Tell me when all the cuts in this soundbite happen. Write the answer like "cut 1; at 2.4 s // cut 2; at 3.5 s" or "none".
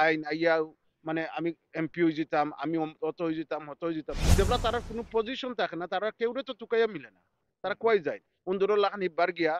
cut 1; at 4.2 s